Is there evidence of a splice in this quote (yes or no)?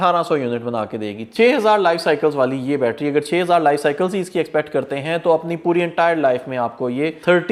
no